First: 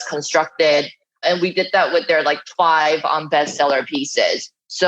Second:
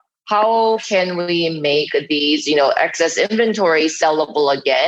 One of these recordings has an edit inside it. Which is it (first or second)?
first